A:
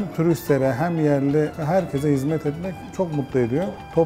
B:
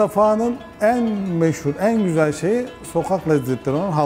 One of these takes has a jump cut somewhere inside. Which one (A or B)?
A